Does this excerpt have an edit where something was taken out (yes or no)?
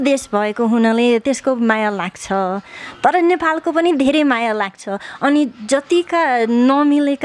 no